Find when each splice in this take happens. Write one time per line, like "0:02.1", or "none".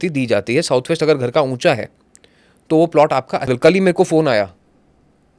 0:03.5